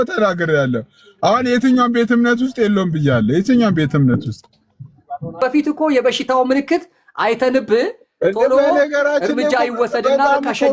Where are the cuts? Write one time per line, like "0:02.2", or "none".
0:05.4

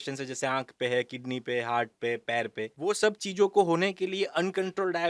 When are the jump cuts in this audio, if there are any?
0:02.8

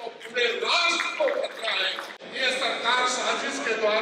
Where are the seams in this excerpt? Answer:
0:02.0

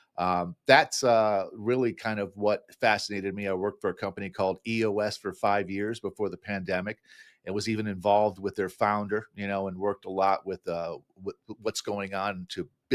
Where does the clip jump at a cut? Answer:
none

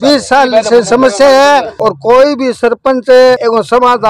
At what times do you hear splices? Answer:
none

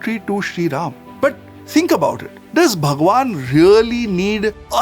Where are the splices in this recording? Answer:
none

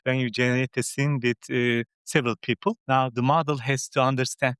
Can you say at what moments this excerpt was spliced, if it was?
0:02.8

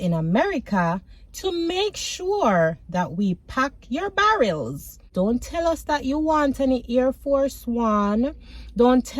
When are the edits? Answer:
0:05.0

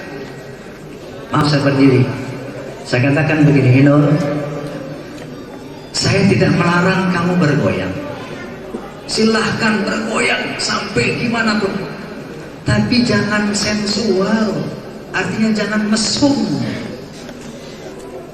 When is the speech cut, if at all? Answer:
0:01.4

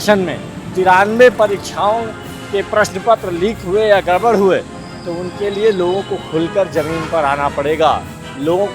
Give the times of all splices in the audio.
none

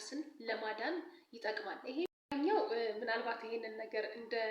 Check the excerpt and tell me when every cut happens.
0:02.1

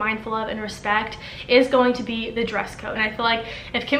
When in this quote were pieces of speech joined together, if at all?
0:03.0

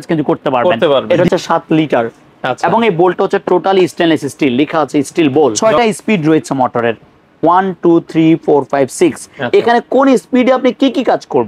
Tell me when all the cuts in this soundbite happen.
0:01.0
0:05.6
0:09.3

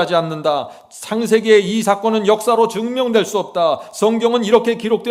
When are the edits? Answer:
none

